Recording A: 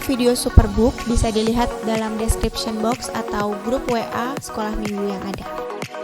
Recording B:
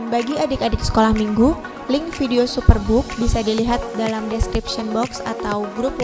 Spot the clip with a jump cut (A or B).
A